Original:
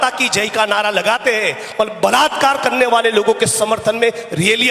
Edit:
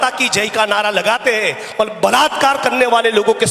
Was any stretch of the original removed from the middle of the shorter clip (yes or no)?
no